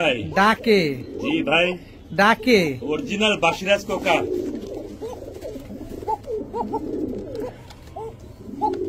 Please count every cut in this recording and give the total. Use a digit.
0